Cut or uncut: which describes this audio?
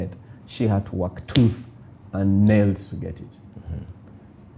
uncut